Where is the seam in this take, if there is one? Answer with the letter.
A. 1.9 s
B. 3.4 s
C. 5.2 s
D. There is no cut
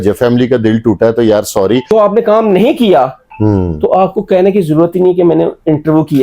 A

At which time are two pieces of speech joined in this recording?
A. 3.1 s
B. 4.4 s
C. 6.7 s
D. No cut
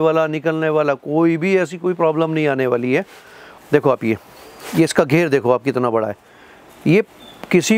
D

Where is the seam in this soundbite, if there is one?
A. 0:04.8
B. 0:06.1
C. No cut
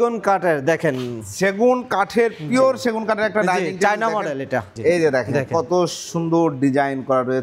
A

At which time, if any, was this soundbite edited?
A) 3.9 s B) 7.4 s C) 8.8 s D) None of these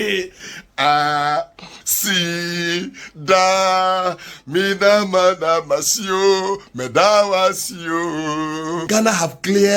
C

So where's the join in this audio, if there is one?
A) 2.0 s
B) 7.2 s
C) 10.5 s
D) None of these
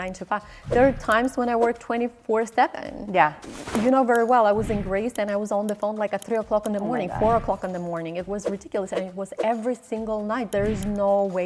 C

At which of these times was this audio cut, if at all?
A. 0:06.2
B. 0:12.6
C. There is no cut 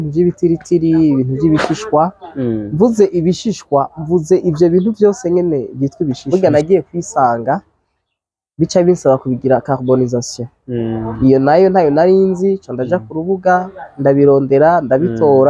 A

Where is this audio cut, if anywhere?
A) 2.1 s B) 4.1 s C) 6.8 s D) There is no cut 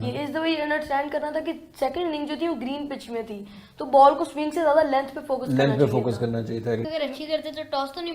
C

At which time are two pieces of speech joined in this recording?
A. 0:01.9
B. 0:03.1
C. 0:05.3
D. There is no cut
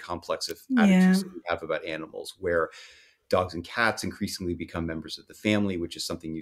D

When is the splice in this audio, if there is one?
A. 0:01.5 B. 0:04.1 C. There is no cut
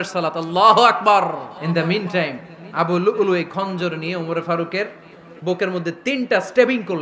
A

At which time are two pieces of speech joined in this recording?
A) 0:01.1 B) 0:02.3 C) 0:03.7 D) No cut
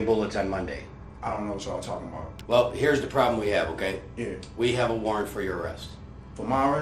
B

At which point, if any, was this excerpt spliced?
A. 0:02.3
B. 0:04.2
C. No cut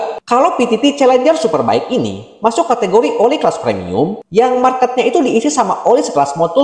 C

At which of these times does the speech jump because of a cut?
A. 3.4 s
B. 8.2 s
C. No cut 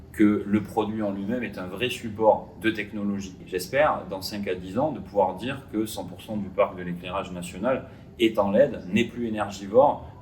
A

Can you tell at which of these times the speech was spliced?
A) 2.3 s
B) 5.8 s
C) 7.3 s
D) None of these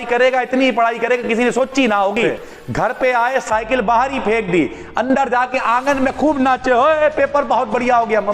A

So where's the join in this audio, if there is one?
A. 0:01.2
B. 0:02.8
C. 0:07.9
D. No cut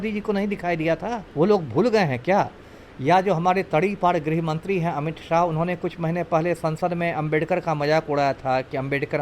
A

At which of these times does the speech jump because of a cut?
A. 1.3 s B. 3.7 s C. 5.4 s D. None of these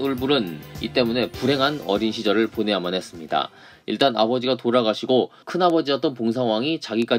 D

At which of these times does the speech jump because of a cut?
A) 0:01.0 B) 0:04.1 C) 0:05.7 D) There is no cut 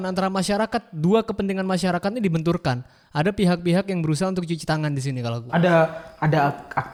D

